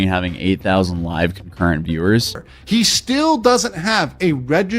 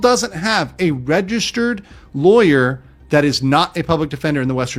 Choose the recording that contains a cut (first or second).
first